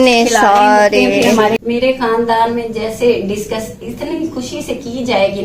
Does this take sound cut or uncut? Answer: cut